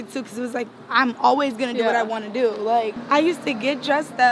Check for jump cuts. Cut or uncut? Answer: cut